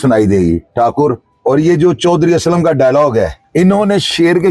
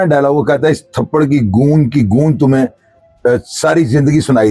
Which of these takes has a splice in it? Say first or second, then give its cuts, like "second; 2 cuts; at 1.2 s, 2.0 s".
first; 2 cuts; at 1.3 s, 3.4 s